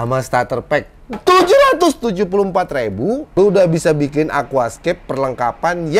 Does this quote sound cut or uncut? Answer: cut